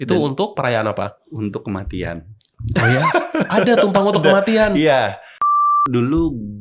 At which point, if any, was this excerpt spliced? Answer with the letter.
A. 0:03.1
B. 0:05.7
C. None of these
B